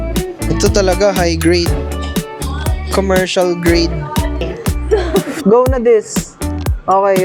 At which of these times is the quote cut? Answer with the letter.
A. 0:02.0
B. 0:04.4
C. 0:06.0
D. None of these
B